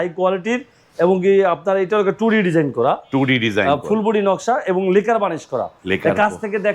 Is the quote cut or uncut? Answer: uncut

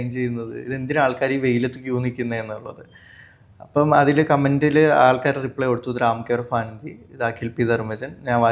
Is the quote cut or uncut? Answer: uncut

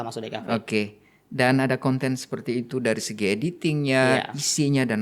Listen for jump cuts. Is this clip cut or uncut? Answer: uncut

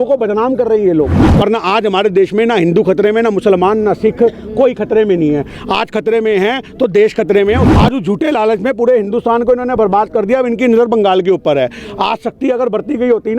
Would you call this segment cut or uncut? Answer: cut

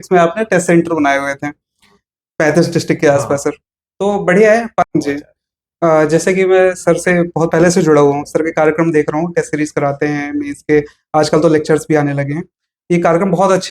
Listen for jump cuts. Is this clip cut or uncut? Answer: cut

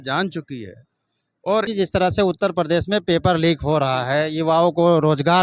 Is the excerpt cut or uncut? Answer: cut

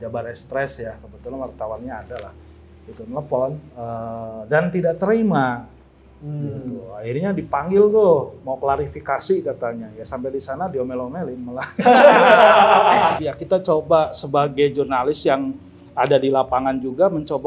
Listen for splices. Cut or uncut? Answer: cut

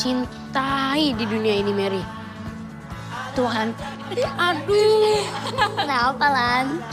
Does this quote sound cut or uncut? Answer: uncut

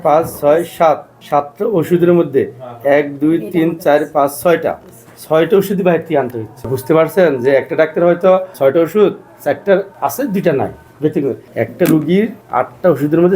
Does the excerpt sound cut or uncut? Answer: cut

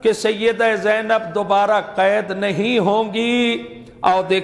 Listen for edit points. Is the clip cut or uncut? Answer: uncut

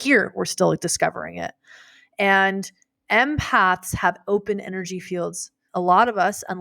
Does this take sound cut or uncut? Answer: cut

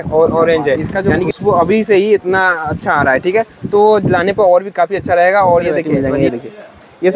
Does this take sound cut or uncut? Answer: cut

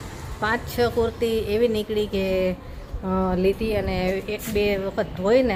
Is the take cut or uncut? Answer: uncut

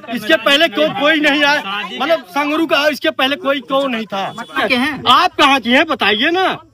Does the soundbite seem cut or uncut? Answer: cut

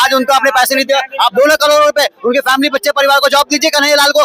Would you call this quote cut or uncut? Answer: uncut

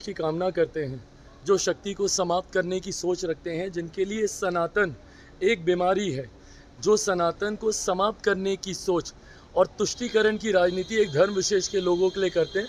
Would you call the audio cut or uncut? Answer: uncut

